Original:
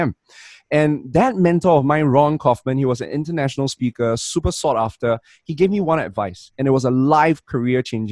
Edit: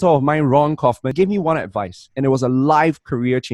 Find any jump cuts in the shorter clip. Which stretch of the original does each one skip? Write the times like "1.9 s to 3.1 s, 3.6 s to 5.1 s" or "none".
2.7 s to 5.5 s